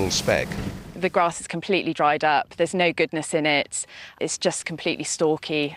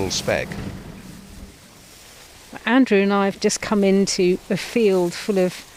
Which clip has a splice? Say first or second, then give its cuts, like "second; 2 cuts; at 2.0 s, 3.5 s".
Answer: first; 2 cuts; at 0.9 s, 4.2 s